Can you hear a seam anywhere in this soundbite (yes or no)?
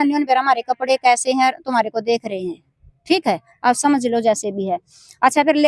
no